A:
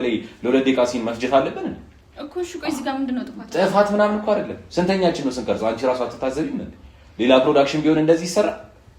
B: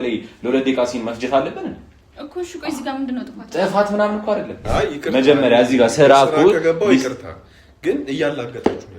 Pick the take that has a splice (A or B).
B